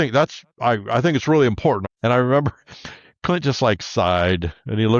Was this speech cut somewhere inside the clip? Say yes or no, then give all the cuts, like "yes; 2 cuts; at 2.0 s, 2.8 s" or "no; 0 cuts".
yes; 1 cut; at 1.8 s